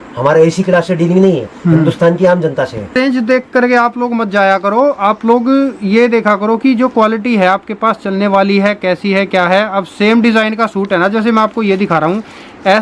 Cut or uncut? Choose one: cut